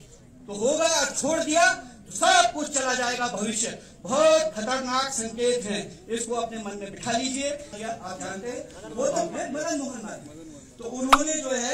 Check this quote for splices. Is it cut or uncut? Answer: cut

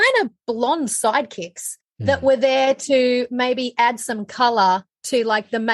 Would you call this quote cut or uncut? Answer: uncut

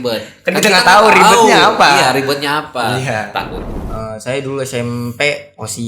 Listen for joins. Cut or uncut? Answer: cut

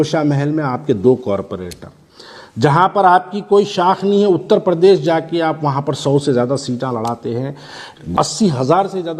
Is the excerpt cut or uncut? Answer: cut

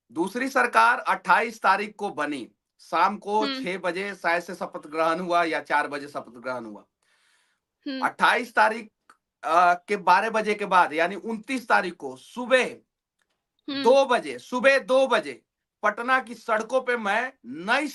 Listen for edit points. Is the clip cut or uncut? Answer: uncut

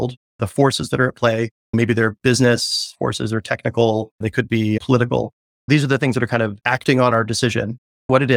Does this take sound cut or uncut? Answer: uncut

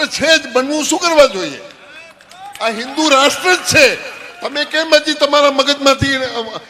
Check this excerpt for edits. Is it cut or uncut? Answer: uncut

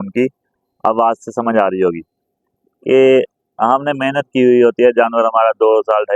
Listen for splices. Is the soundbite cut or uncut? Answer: uncut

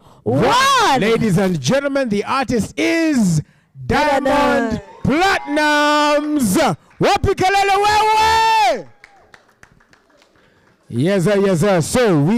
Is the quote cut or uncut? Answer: uncut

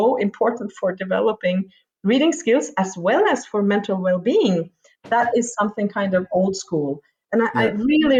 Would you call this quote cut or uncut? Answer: uncut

